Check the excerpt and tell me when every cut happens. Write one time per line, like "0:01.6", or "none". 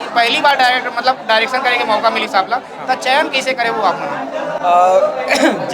none